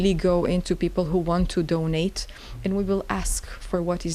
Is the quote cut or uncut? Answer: uncut